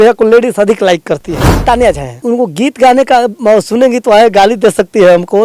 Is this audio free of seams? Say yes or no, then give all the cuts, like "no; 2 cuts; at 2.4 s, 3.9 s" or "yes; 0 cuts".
no; 1 cut; at 1.6 s